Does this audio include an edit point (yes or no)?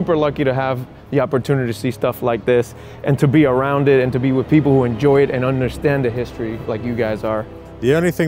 no